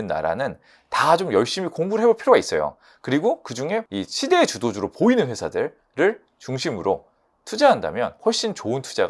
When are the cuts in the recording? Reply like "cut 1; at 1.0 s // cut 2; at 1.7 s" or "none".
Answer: cut 1; at 3.8 s // cut 2; at 8.2 s